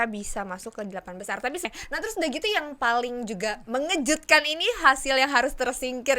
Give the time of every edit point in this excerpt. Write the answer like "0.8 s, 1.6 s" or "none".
1.6 s